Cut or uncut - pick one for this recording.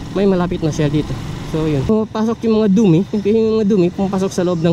cut